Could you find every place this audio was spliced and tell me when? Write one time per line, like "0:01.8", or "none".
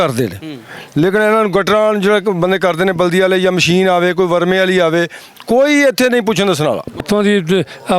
0:07.0

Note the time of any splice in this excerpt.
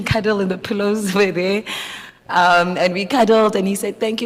none

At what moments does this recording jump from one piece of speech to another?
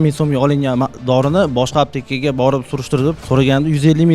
0:03.2

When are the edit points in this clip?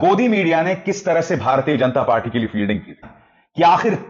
0:03.0

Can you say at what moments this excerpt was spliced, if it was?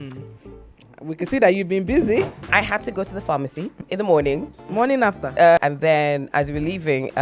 0:02.4
0:03.8
0:04.7
0:05.6

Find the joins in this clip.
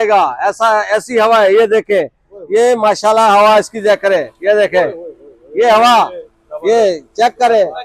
none

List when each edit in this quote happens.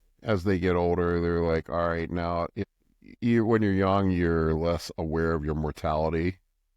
0:02.6

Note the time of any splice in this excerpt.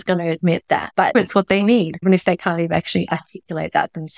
0:01.1
0:02.0

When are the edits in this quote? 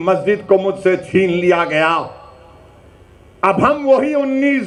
none

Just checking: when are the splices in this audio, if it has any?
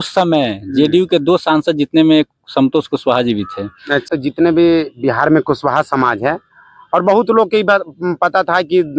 0:04.1

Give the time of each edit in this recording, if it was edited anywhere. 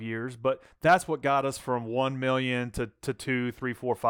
none

